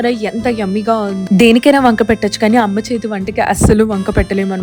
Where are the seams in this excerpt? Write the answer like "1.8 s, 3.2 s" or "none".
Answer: 1.2 s